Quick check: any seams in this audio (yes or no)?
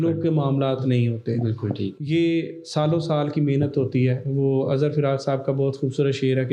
no